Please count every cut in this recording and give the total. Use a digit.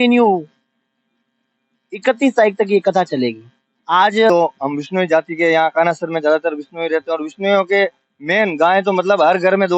1